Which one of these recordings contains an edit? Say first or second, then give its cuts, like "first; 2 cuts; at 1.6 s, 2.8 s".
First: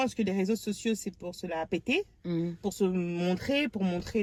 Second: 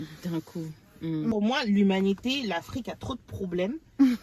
second; 1 cut; at 1.3 s